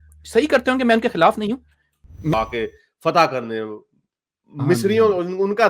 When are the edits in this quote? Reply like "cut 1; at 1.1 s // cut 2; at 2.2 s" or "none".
cut 1; at 2.3 s